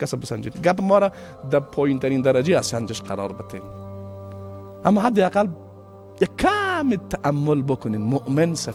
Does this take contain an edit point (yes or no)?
no